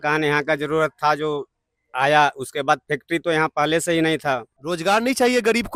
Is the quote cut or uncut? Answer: uncut